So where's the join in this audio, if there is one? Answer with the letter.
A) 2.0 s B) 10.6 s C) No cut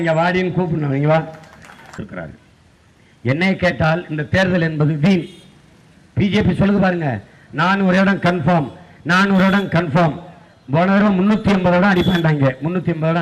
A